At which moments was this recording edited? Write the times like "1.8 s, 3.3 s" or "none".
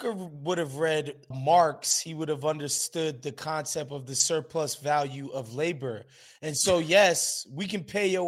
1.3 s, 2.8 s